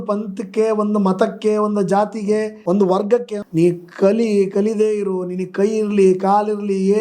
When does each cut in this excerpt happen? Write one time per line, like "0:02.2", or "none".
0:02.5
0:03.4